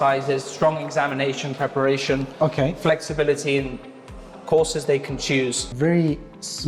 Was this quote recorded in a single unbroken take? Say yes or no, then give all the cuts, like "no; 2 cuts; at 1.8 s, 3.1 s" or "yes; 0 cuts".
no; 1 cut; at 5.7 s